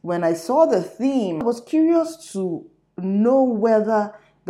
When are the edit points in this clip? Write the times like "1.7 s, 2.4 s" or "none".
1.4 s

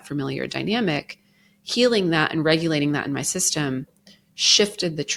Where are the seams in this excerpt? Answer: none

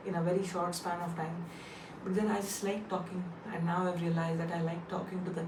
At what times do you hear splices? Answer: none

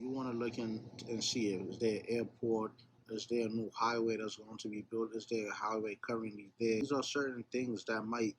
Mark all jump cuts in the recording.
6.8 s

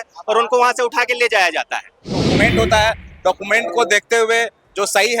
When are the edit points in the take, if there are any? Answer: 2.3 s

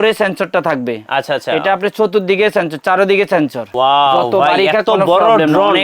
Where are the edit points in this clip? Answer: 3.7 s

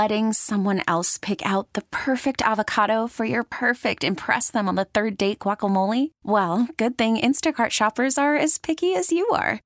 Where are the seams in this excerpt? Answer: none

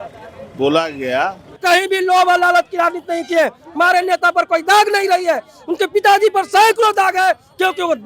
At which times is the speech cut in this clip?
1.5 s

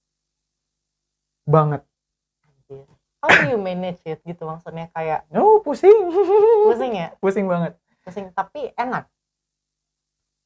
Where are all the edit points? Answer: 3.1 s

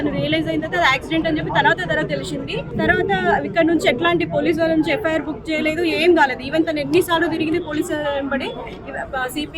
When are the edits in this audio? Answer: 2.7 s

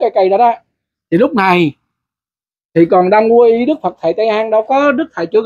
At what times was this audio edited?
none

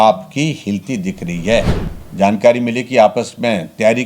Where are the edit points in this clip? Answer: 1.8 s

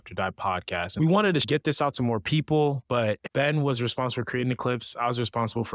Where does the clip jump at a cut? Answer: 0.9 s, 1.4 s, 3.2 s

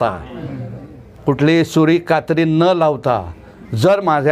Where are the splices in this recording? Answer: none

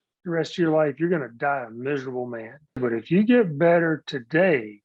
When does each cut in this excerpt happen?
2.8 s

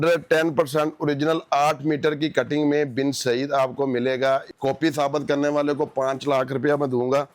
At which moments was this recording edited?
4.5 s

